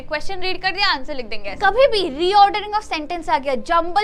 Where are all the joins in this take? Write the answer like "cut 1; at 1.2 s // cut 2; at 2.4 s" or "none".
cut 1; at 1.5 s